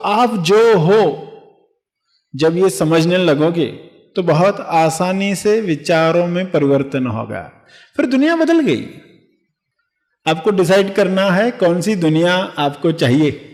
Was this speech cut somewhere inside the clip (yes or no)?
no